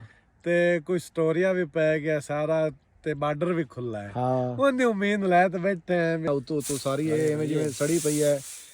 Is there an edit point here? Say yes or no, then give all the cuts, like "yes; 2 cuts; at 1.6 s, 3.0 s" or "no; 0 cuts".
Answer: yes; 1 cut; at 6.3 s